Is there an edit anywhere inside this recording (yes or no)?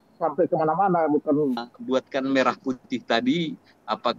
yes